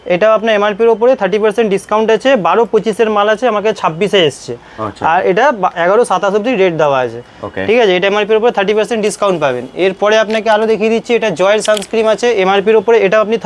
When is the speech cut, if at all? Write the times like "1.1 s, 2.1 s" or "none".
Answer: none